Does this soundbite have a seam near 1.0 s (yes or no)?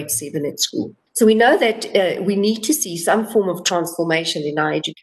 yes